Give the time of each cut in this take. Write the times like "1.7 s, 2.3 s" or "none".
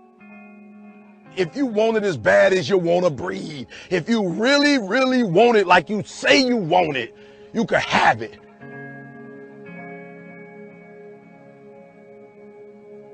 none